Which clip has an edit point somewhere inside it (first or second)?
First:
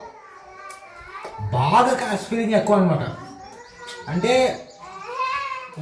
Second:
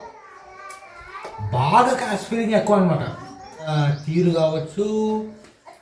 second